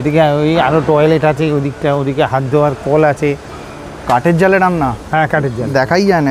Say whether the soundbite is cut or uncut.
cut